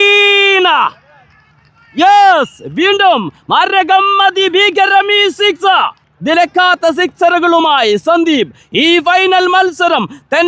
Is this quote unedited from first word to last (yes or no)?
no